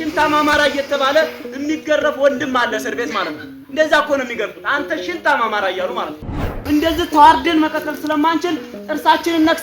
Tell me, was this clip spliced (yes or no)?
yes